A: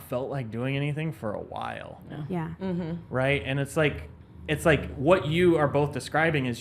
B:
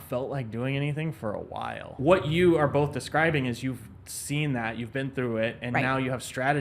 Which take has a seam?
B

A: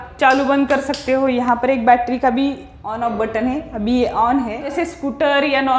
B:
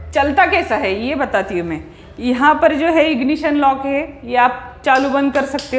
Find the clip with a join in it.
A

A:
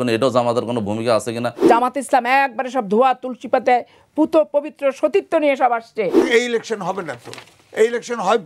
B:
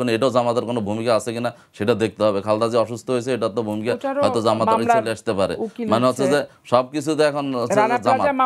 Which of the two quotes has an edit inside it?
A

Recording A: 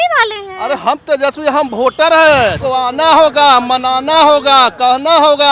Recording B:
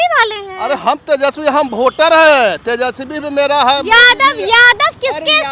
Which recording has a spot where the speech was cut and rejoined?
A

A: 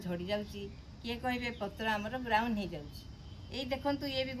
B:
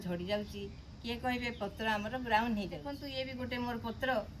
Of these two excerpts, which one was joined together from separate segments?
B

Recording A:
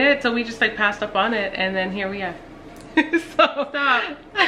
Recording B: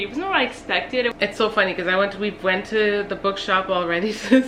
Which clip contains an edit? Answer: B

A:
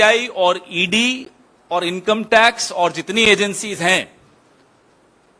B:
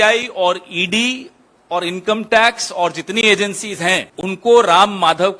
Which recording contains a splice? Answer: B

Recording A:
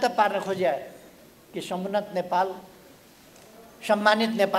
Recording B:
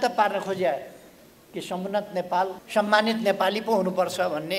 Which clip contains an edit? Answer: B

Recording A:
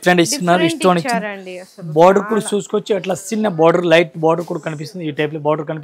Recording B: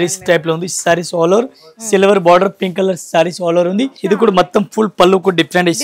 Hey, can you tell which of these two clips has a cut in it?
B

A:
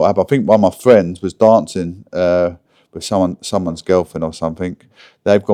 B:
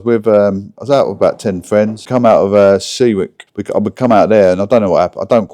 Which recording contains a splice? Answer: B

